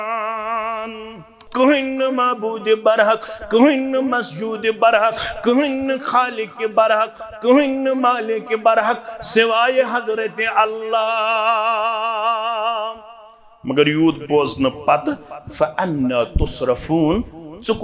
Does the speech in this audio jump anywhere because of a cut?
yes; 1 cut; at 1.4 s

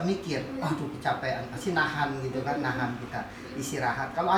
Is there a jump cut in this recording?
no; 0 cuts

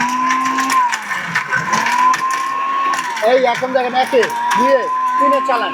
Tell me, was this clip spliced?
no; 0 cuts

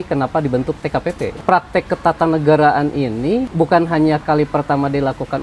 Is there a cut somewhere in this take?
yes; 2 cuts; at 1.4 s, 3.5 s

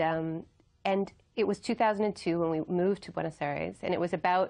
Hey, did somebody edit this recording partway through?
no; 0 cuts

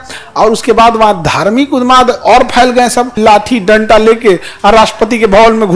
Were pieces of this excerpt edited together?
yes; 1 cut; at 3.1 s

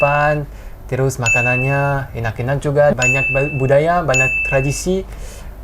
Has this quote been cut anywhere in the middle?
yes; 1 cut; at 2.9 s

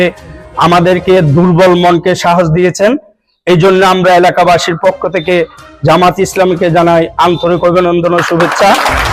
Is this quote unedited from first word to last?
yes; 0 cuts

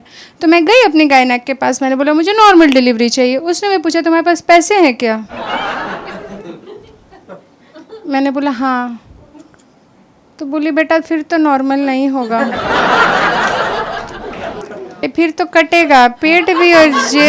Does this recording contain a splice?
yes; 1 cut; at 15.0 s

